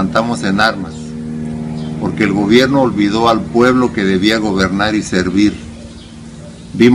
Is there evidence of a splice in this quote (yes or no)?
yes